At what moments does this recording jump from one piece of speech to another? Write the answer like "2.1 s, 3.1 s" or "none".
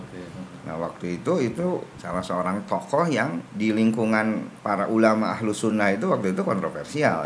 1.9 s, 3.4 s